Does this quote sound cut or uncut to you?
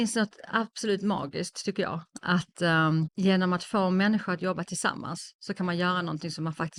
uncut